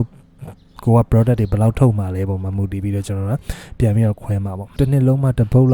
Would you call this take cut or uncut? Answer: cut